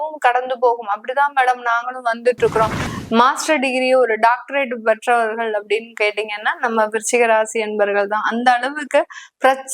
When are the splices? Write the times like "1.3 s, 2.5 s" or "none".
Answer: 2.8 s